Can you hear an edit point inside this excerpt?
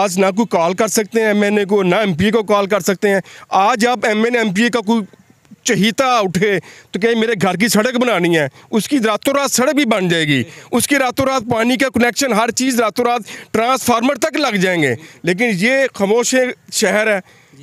no; 0 cuts

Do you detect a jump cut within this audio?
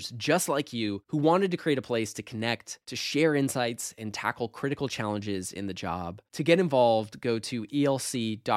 no; 0 cuts

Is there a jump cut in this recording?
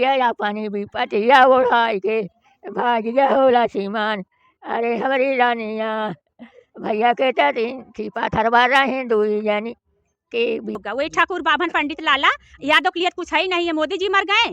yes; 1 cut; at 10.8 s

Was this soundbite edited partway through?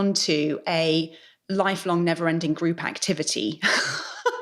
no; 0 cuts

